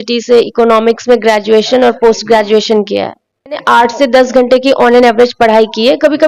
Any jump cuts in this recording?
yes; 1 cut; at 3.6 s

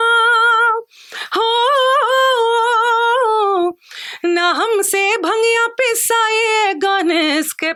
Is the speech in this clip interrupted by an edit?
no; 0 cuts

